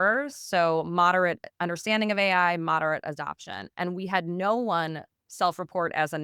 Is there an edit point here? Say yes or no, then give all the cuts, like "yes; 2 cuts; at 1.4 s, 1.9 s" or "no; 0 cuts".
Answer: no; 0 cuts